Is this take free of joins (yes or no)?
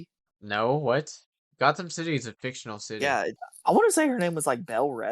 no